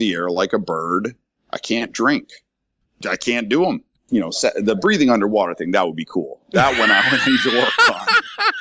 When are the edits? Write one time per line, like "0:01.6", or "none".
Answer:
0:02.8
0:03.9

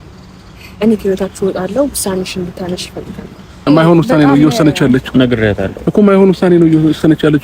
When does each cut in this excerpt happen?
0:03.6

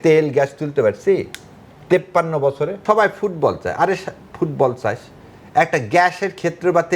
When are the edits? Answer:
0:02.8

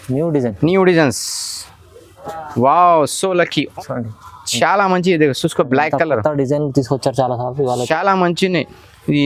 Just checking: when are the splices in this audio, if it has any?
0:03.7

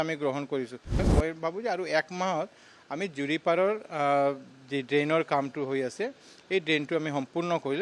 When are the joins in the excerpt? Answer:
0:01.0

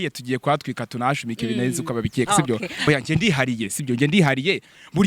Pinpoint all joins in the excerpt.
0:02.9

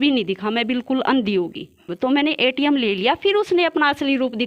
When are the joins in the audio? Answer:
0:01.9

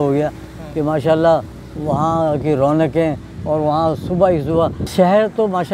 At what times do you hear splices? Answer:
0:04.8

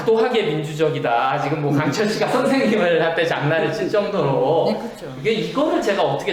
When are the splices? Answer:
none

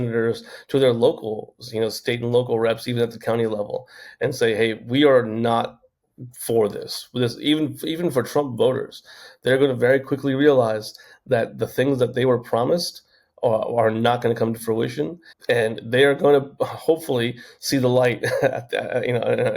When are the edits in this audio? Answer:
0:15.3

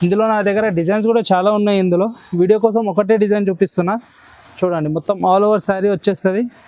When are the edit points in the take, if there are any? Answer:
none

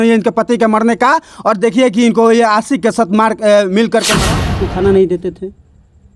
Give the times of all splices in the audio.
0:04.5

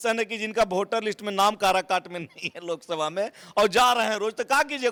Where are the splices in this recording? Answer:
none

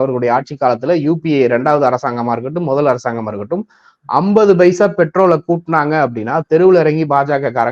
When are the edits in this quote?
none

